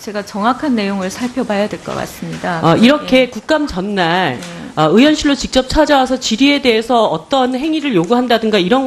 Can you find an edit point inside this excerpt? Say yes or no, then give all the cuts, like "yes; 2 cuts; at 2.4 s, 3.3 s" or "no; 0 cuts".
no; 0 cuts